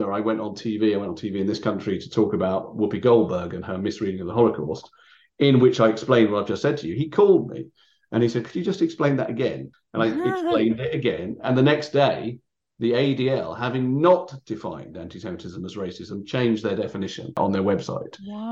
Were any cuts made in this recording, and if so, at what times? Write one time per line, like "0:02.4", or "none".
0:09.7
0:17.4